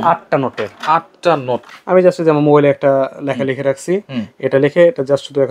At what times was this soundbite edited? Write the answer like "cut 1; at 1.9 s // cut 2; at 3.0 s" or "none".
cut 1; at 1.7 s